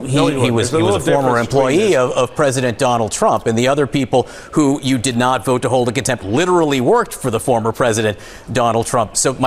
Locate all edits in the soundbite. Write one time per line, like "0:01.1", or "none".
none

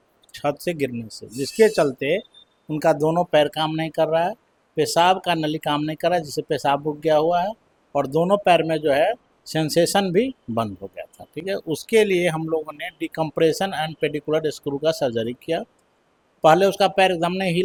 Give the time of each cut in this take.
none

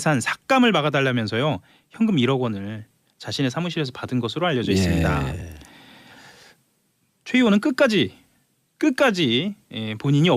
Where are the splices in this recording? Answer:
0:05.1

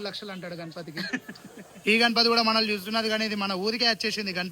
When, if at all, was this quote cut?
0:01.7

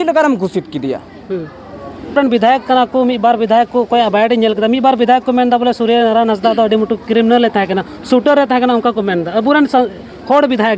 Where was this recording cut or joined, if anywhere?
0:02.2

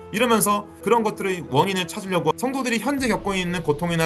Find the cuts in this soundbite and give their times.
0:02.3

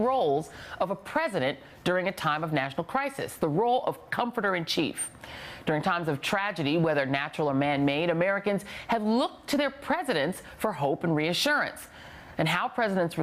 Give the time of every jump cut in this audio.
0:09.8

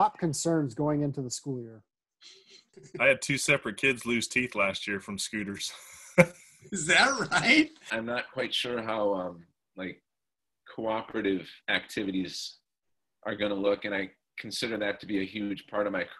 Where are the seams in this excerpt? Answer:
0:02.8
0:07.8

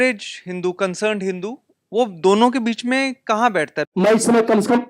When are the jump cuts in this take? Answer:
0:03.9

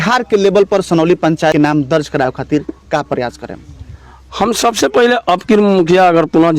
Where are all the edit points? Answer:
0:01.5

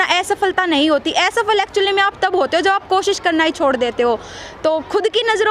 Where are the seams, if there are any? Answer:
none

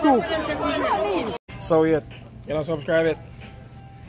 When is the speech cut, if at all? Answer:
0:01.5

